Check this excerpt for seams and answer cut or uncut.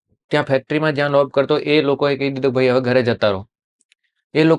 uncut